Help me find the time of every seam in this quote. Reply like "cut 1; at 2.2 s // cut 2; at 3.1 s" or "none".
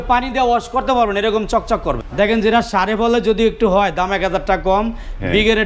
cut 1; at 2.0 s